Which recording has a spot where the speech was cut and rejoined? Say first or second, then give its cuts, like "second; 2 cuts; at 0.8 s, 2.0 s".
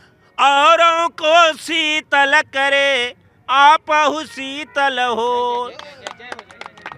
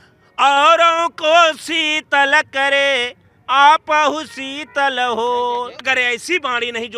second; 1 cut; at 5.8 s